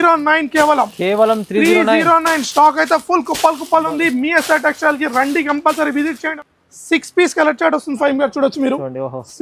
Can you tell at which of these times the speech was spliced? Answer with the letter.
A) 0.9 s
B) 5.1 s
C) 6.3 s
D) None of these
C